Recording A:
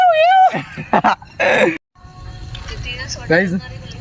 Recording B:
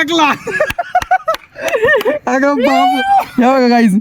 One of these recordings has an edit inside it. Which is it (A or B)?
A